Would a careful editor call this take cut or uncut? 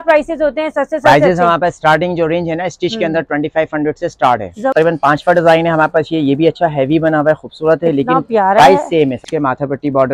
cut